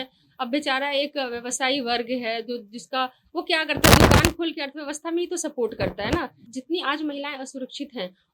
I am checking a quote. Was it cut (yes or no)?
yes